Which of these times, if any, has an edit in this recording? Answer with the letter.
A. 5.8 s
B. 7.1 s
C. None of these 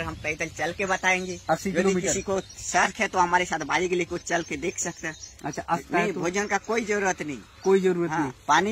A